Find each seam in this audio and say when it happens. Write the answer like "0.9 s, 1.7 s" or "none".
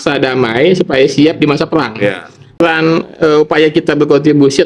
2.6 s